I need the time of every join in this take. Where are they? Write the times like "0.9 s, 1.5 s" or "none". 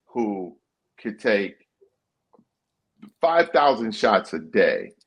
none